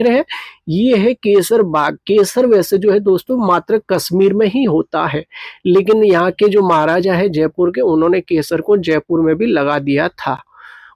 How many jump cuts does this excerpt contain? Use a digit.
0